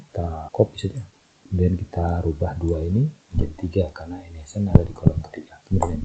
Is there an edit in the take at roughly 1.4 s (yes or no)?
yes